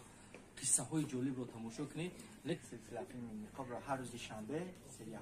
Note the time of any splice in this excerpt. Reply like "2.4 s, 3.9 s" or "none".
2.6 s